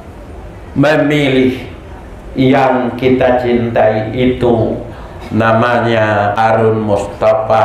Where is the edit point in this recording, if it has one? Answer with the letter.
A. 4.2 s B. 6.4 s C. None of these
B